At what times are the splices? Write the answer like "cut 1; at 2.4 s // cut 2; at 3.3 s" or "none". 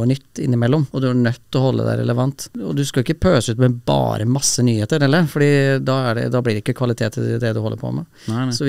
cut 1; at 0.9 s // cut 2; at 2.6 s